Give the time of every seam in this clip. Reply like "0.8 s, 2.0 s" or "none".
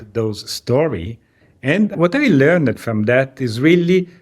1.9 s